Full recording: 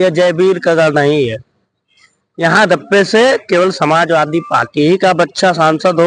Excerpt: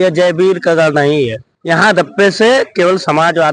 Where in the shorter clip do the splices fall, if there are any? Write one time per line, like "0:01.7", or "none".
0:01.5